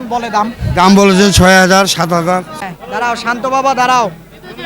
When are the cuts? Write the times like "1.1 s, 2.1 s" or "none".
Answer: 2.6 s